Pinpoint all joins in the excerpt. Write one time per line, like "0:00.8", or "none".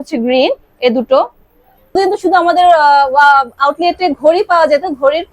0:01.9